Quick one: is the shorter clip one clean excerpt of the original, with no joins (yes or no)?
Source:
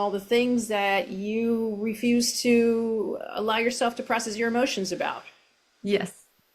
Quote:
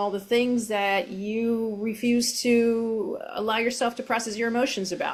yes